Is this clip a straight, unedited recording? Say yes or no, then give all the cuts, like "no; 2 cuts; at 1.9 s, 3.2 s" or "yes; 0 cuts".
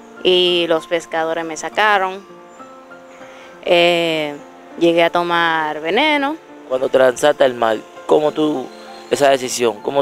yes; 0 cuts